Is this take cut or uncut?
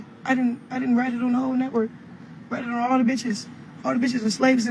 uncut